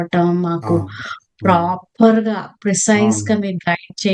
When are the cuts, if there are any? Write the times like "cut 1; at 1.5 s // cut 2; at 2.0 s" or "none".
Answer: cut 1; at 2.6 s